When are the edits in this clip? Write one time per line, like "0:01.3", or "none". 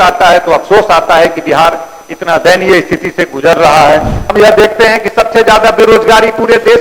0:04.2